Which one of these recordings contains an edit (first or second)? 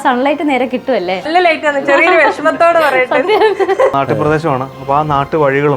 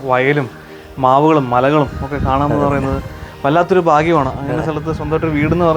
first